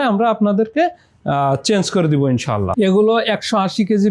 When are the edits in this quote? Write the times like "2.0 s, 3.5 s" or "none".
2.8 s